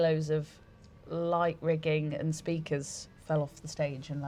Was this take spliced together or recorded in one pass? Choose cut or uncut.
uncut